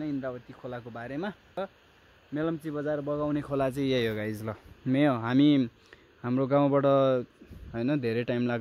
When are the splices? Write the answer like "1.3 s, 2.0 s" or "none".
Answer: 1.5 s

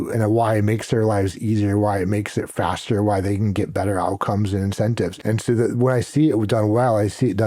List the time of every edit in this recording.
5.2 s

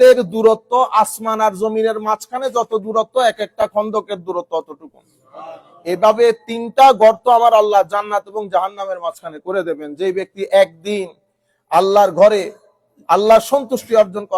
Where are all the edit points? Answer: none

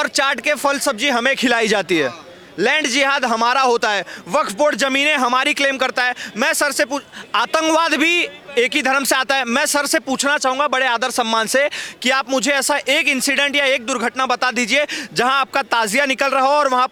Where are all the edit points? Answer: none

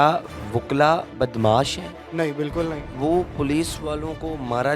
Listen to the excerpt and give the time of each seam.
2.0 s, 2.9 s

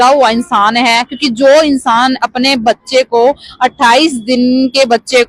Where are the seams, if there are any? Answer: none

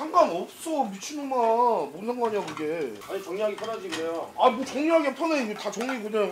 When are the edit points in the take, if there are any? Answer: none

